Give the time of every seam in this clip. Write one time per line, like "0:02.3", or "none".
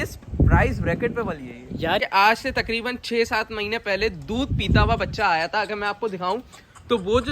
0:02.0